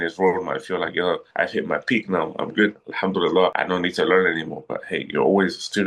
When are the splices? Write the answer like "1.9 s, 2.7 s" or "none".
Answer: 3.6 s

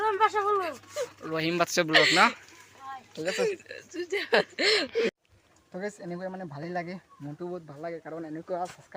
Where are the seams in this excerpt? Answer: none

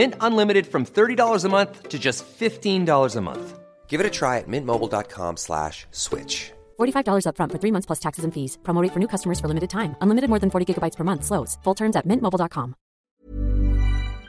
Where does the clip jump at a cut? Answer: 13.1 s

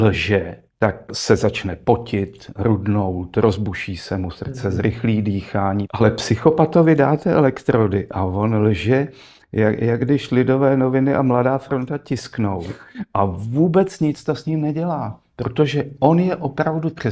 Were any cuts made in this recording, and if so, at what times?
1.1 s, 5.8 s

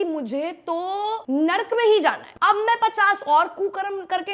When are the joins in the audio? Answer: 1.2 s, 2.3 s

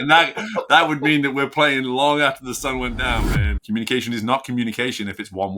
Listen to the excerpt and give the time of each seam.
3.6 s

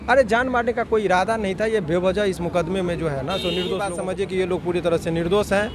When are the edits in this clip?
3.9 s

